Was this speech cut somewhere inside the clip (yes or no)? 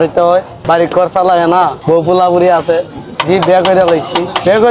no